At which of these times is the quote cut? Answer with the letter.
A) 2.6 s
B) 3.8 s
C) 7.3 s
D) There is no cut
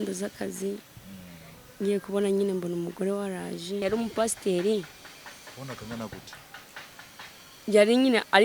B